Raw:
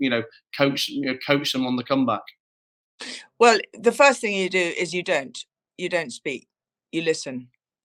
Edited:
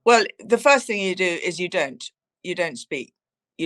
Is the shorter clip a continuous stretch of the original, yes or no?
yes